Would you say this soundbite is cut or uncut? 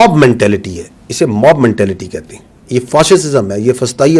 uncut